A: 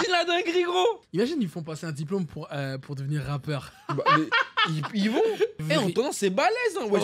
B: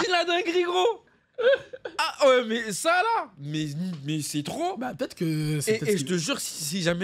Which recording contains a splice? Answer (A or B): A